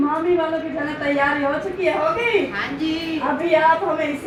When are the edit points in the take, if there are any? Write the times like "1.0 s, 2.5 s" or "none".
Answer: none